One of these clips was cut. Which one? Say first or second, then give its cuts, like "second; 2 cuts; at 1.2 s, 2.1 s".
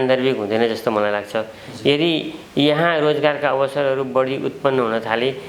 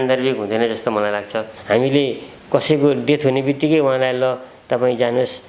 second; 1 cut; at 1.5 s